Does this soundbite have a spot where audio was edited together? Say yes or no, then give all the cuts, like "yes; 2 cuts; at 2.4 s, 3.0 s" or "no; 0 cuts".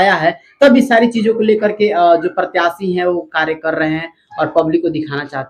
no; 0 cuts